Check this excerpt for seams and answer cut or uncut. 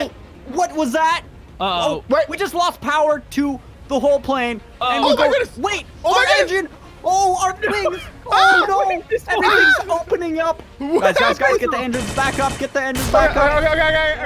uncut